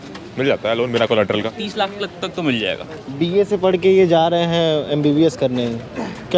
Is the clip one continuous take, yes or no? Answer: yes